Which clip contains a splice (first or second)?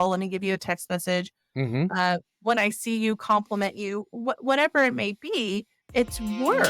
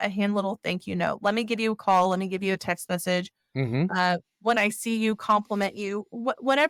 first